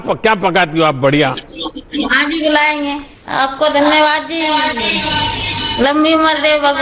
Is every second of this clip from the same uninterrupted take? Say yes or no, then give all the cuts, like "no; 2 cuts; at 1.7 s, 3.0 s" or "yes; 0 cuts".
no; 1 cut; at 3.1 s